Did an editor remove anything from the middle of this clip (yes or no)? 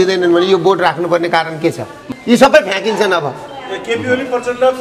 yes